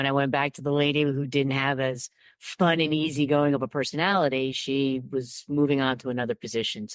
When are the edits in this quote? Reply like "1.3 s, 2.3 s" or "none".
none